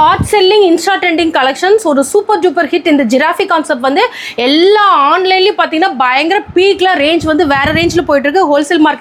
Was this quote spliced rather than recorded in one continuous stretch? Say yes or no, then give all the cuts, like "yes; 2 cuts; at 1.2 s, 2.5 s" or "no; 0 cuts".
no; 0 cuts